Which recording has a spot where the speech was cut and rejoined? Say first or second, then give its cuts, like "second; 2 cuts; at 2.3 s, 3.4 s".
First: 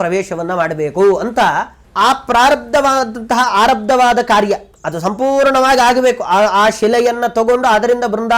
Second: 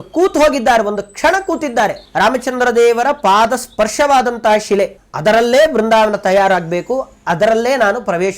second; 2 cuts; at 2.0 s, 5.0 s